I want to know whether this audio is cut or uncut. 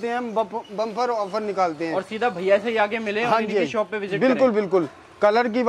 uncut